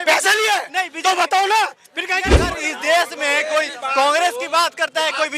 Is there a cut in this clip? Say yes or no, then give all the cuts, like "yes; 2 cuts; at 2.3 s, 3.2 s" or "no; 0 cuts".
yes; 1 cut; at 2.5 s